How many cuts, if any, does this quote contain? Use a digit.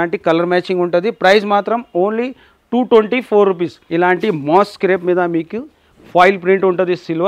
1